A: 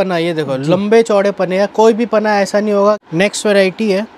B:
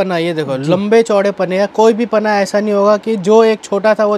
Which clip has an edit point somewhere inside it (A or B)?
A